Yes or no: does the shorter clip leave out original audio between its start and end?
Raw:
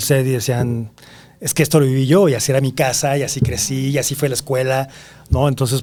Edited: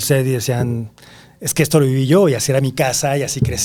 no